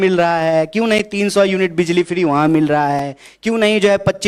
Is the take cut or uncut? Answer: uncut